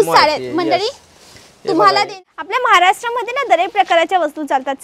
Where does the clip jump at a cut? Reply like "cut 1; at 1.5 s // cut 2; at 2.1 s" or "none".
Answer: cut 1; at 2.1 s